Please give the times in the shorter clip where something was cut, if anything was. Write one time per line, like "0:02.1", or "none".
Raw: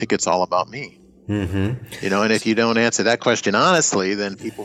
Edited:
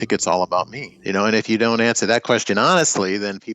0:00.9